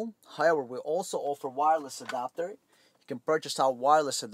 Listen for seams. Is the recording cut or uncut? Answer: uncut